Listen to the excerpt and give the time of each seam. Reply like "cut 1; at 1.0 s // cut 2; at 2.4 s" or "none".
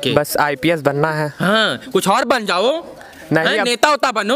none